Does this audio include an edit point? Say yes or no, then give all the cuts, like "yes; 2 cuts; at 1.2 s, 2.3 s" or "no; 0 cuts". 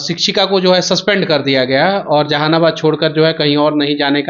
no; 0 cuts